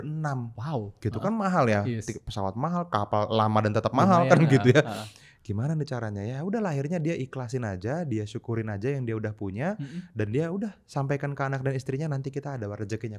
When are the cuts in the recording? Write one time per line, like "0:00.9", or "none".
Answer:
none